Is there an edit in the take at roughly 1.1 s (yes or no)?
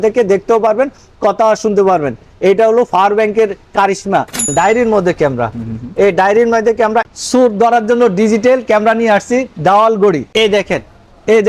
no